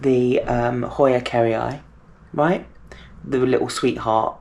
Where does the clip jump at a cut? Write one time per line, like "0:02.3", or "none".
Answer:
none